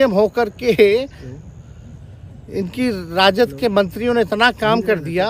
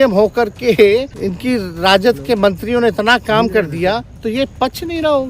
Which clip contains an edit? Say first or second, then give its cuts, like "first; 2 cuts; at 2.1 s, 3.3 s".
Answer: second; 2 cuts; at 1.1 s, 4.5 s